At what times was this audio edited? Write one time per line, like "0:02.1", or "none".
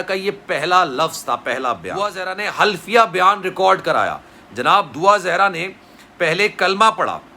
0:02.2